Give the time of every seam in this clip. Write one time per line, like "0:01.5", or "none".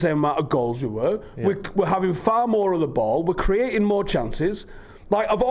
none